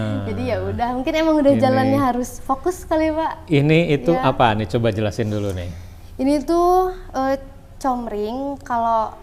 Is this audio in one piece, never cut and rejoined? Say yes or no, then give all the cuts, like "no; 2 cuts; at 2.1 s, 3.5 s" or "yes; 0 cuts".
yes; 0 cuts